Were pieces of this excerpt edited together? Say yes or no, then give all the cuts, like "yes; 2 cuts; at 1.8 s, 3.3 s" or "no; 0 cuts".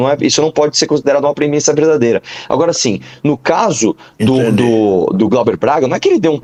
no; 0 cuts